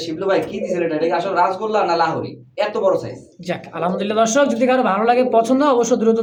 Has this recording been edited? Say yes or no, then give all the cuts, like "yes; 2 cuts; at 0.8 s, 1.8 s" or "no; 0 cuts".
no; 0 cuts